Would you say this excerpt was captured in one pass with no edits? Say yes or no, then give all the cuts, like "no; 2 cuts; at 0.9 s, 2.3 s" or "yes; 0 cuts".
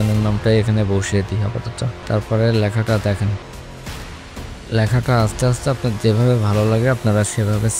no; 1 cut; at 2.0 s